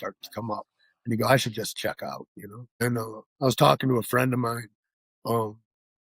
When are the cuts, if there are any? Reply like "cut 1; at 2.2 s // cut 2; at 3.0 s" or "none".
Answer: cut 1; at 2.6 s